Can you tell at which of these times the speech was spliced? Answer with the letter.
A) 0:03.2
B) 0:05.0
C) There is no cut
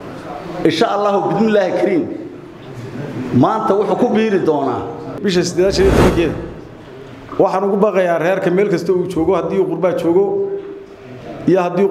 B